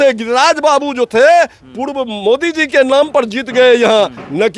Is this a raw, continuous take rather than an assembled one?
yes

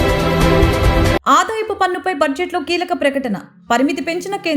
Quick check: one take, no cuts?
yes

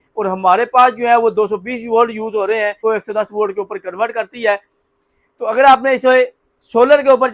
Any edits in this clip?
yes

